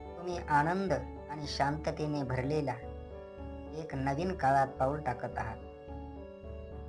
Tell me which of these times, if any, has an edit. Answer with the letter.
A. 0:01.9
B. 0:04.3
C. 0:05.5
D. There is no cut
C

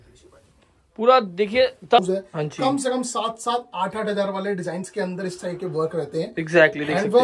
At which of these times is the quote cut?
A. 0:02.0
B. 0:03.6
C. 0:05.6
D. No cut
A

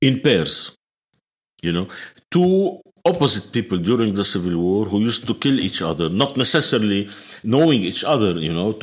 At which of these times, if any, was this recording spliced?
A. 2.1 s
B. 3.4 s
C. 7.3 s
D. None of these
D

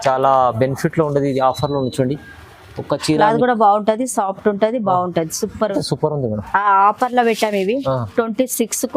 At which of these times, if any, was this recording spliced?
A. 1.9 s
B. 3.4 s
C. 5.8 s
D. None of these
C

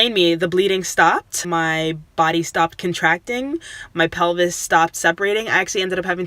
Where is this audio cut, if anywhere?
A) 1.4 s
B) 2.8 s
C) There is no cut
A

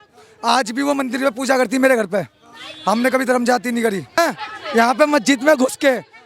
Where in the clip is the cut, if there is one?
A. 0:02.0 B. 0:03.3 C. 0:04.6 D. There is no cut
C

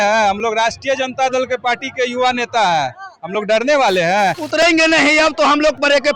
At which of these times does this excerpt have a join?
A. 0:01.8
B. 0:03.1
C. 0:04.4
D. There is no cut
C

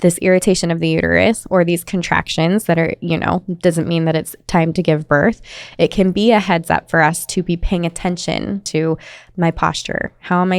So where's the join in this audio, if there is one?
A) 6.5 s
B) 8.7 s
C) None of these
B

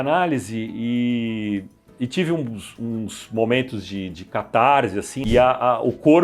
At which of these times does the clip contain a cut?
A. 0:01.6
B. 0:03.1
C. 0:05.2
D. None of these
C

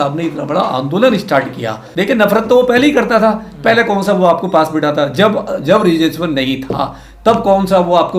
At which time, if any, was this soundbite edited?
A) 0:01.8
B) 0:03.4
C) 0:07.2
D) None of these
A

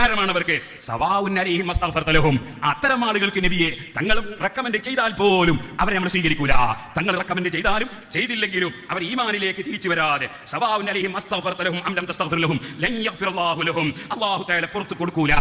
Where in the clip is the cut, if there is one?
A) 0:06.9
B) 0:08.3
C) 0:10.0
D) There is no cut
D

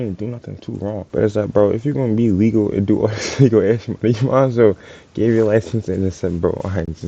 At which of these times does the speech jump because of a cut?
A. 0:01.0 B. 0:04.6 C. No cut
A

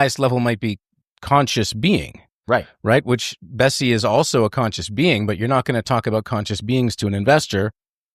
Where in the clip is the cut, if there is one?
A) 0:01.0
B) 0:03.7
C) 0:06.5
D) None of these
D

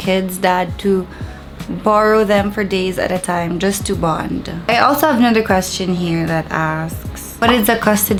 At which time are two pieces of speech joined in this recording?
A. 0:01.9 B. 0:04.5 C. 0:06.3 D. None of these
D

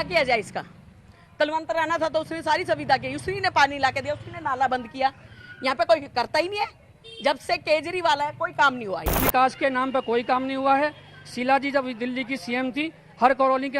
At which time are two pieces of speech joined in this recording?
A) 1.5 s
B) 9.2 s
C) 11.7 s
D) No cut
B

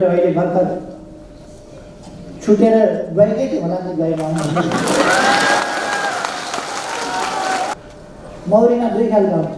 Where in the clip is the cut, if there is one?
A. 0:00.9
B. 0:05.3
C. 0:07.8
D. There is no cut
C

